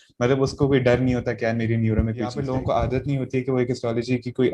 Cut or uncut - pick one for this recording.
cut